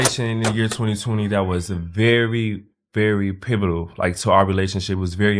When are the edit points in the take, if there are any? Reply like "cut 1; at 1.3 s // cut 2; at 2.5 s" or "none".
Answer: none